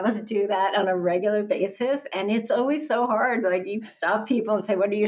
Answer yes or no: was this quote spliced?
no